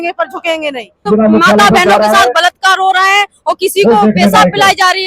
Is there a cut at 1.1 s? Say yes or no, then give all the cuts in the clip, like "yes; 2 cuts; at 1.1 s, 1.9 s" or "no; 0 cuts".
yes; 1 cut; at 1.1 s